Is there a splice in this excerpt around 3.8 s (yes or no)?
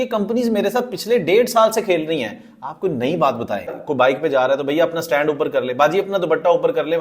yes